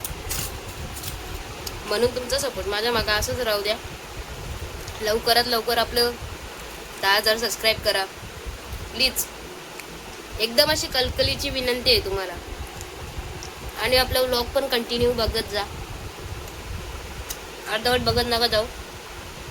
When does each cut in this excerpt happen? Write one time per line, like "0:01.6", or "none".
none